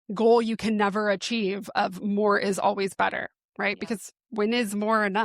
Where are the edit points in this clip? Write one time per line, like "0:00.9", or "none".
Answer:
none

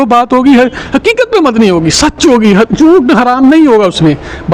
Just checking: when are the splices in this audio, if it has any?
none

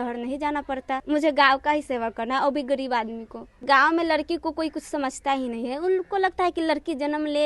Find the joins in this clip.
0:01.0
0:03.6

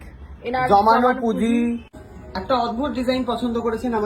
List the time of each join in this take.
0:01.9

